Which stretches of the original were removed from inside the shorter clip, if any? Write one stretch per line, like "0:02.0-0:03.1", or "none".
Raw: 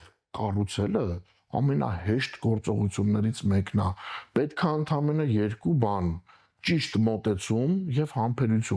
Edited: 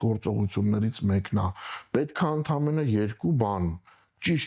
none